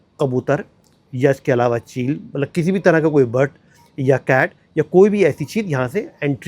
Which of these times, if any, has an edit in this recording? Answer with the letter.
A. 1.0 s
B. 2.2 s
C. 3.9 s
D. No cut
D